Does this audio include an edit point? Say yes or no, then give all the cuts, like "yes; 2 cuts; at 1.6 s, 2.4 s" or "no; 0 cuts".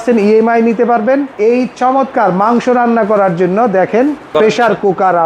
yes; 2 cuts; at 1.3 s, 4.3 s